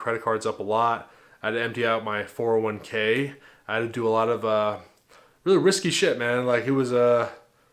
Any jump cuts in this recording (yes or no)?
no